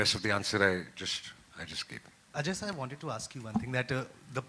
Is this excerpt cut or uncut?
cut